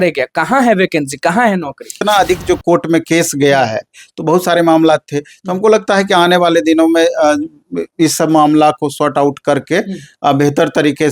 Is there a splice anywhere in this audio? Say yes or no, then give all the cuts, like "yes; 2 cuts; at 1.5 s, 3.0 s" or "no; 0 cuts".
yes; 1 cut; at 2.0 s